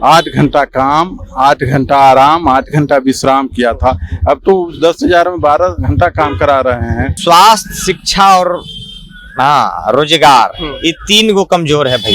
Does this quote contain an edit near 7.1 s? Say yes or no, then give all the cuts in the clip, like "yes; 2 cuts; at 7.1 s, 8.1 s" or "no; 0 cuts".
yes; 1 cut; at 7.1 s